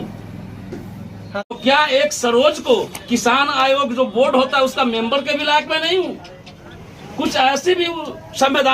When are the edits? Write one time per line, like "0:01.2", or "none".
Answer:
0:01.5